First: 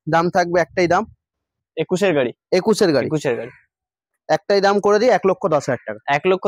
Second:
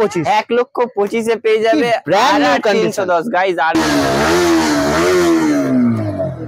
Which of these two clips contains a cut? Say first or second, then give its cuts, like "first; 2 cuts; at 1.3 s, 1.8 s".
second; 1 cut; at 3.7 s